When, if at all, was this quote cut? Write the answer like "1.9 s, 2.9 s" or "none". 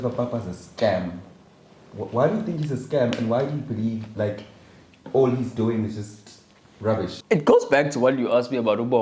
7.2 s